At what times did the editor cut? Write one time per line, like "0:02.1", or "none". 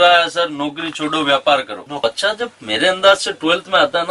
0:01.8